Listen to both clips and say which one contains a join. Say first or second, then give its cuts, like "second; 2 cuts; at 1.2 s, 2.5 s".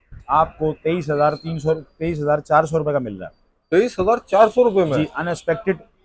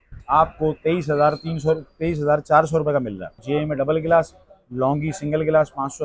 second; 1 cut; at 3.3 s